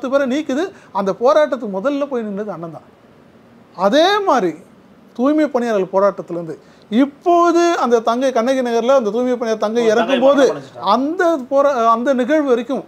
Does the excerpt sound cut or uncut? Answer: uncut